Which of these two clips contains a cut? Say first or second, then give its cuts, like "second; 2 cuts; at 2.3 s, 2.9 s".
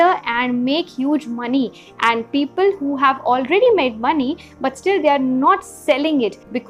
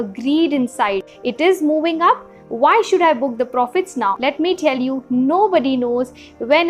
second; 1 cut; at 4.2 s